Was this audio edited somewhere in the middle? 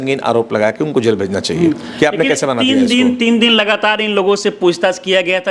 no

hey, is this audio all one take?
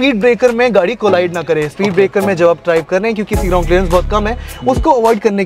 yes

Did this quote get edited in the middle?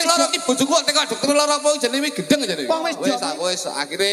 yes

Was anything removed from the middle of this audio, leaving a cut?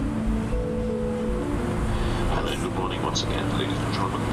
no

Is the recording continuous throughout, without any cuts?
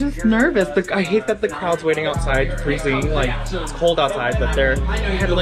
yes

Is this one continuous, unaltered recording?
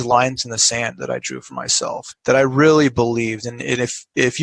no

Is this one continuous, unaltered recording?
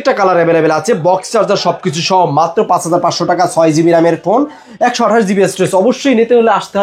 yes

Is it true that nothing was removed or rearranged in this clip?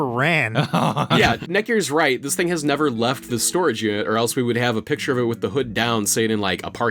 no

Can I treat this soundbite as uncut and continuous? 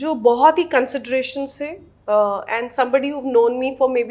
yes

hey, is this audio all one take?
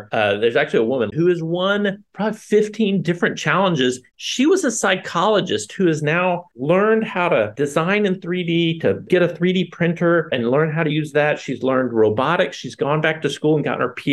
no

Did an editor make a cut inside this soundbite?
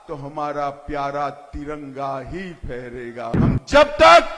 yes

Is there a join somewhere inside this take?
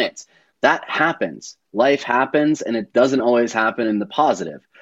no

